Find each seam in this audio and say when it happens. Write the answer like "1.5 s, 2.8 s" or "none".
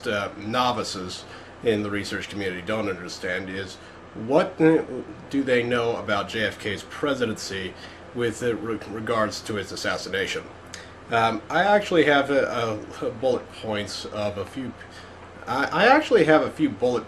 9.9 s